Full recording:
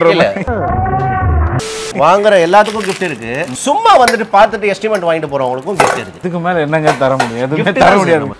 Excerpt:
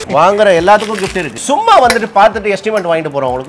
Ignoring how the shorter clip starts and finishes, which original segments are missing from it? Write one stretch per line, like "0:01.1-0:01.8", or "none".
0:03.1-0:03.5